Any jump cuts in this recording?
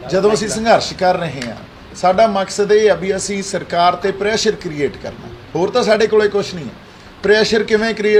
no; 0 cuts

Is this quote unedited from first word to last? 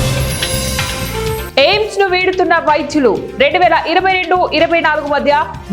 no; 1 cut; at 1.1 s

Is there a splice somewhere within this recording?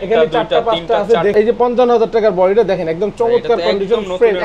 yes; 1 cut; at 1.3 s

